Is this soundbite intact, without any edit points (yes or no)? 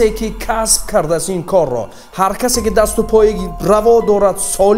no